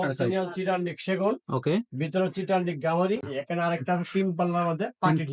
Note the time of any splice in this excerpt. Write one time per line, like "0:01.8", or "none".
0:03.3